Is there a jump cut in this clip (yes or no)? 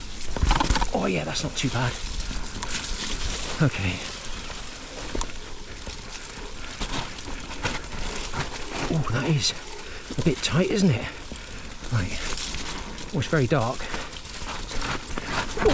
no